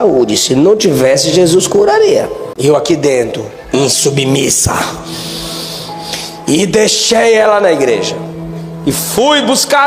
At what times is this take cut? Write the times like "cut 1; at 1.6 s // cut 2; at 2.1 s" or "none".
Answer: cut 1; at 2.4 s